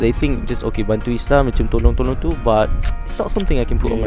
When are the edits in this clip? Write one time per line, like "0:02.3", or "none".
none